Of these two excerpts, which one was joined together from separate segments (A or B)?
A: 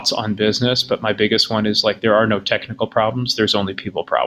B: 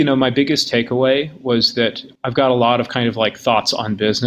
B